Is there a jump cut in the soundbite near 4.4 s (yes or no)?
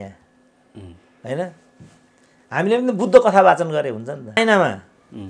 yes